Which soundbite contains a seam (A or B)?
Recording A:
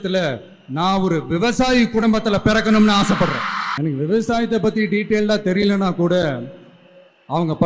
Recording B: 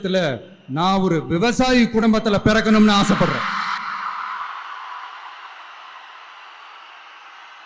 A